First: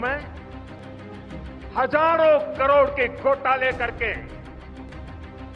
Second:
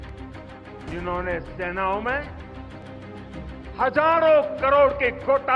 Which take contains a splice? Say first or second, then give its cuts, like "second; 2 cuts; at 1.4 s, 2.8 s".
second; 1 cut; at 0.9 s